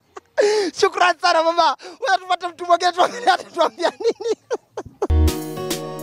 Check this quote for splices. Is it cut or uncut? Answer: cut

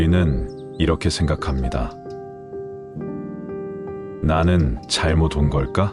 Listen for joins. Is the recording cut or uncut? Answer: cut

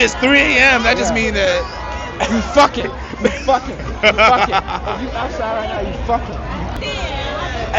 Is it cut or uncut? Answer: uncut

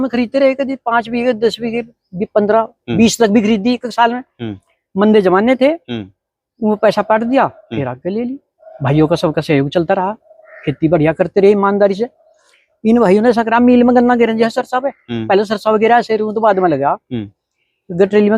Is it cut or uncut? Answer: uncut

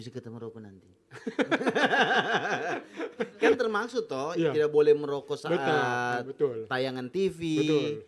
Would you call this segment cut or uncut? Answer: uncut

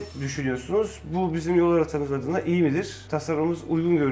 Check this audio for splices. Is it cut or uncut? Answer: uncut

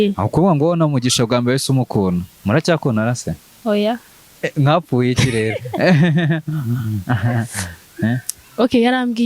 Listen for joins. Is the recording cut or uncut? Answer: cut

